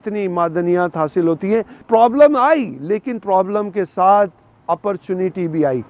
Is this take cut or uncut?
cut